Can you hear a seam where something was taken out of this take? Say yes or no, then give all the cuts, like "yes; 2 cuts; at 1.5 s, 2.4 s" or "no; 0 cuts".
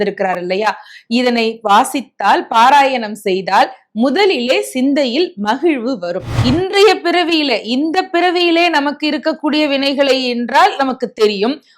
yes; 1 cut; at 6.3 s